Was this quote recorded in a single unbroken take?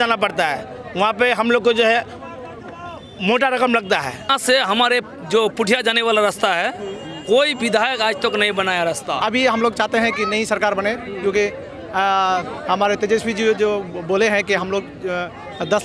no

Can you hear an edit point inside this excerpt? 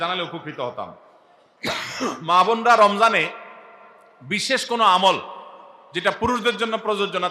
no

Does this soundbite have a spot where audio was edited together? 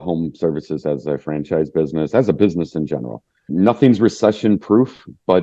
yes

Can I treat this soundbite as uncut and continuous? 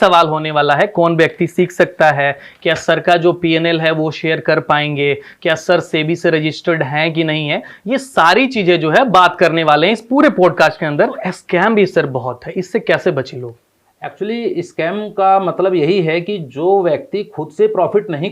no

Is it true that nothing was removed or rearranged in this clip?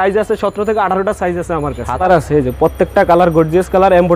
no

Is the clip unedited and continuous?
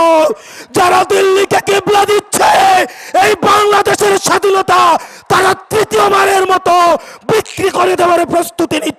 yes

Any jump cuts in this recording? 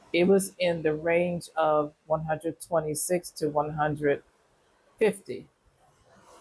no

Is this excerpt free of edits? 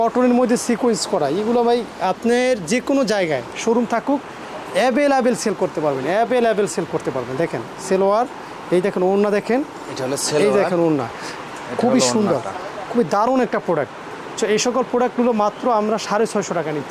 yes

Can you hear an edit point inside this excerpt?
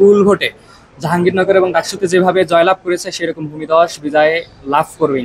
no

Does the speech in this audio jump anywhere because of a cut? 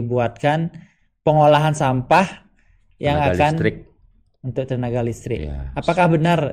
no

